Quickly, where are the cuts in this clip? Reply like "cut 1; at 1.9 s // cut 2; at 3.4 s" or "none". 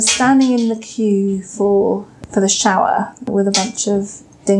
cut 1; at 2.1 s

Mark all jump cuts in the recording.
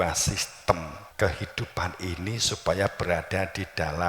cut 1; at 1.0 s

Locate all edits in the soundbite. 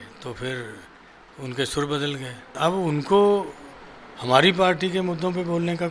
cut 1; at 2.6 s

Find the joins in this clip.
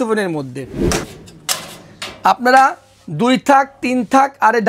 cut 1; at 1.1 s

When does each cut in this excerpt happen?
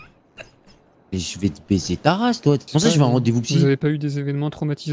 cut 1; at 2.7 s

